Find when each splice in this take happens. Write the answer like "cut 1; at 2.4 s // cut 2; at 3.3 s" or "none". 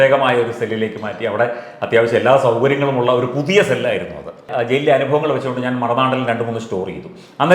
cut 1; at 4.5 s